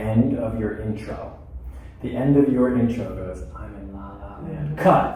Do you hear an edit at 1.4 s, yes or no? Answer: no